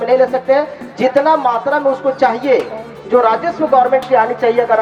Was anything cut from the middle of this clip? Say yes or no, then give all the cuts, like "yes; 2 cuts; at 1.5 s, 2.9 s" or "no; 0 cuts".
no; 0 cuts